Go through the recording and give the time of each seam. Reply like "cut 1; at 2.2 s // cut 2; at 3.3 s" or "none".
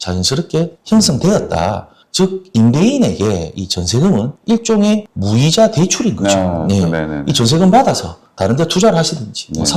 none